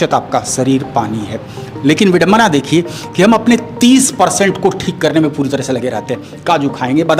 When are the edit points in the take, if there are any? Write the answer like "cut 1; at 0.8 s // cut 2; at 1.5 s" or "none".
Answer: none